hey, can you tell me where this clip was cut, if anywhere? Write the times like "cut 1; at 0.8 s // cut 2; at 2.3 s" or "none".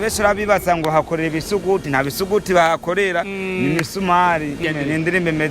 cut 1; at 4.6 s